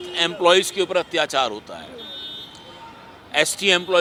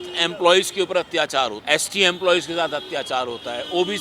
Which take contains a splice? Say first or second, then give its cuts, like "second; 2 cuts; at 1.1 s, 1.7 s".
second; 1 cut; at 1.6 s